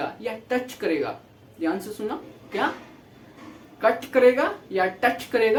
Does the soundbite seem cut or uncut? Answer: uncut